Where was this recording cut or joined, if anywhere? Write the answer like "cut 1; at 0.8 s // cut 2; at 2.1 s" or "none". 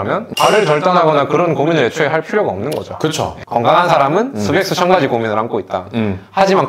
cut 1; at 3.4 s